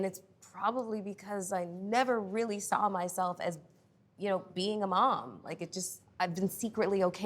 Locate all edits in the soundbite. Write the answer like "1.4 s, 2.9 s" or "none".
6.1 s